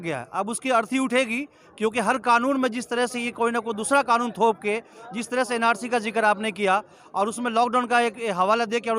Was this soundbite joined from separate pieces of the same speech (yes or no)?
no